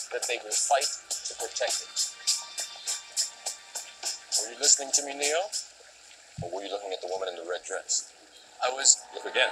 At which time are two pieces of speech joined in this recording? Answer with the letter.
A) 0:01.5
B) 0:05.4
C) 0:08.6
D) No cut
D